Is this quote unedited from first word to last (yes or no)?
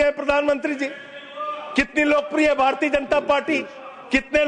yes